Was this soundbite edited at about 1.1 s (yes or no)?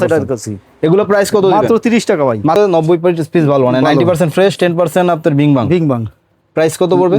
no